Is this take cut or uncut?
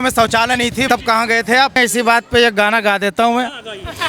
cut